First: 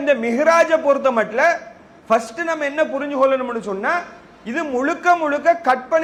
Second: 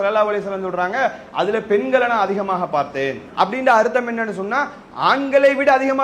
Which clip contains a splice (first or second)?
second